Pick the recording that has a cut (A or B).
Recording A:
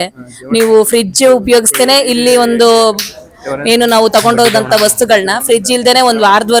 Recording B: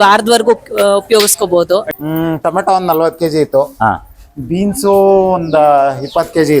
B